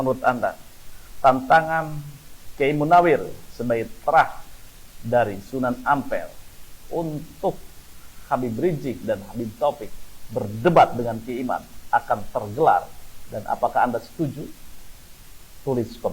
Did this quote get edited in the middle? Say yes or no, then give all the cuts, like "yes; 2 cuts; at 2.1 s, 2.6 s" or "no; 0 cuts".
no; 0 cuts